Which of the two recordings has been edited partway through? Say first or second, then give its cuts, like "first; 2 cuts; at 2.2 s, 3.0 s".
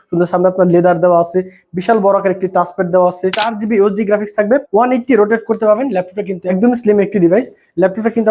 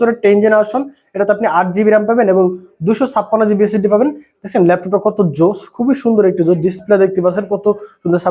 first; 3 cuts; at 3.5 s, 4.7 s, 6.5 s